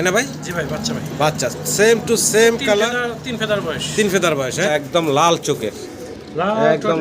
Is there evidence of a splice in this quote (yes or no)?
yes